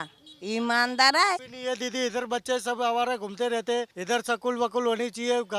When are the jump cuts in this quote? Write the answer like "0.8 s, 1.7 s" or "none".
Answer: 1.5 s, 3.9 s